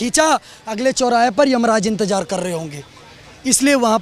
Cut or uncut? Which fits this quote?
uncut